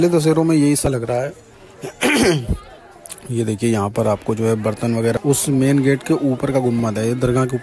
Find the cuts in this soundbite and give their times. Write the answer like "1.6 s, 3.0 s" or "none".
0.9 s, 5.2 s